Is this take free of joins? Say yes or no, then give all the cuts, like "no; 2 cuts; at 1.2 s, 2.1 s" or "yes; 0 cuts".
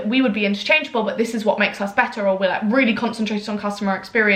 yes; 0 cuts